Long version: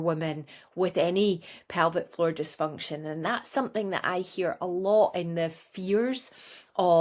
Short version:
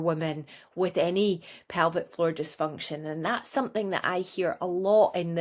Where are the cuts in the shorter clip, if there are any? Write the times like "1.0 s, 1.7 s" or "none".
none